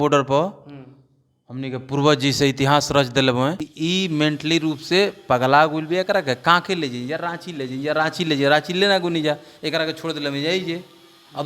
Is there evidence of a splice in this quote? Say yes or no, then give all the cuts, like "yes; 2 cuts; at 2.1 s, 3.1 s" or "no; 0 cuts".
yes; 1 cut; at 3.7 s